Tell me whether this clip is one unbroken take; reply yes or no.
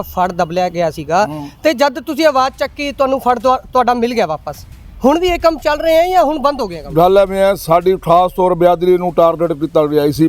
yes